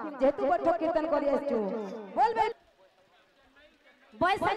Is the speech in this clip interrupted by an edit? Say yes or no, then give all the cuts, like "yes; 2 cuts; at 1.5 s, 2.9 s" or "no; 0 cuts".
yes; 1 cut; at 2.5 s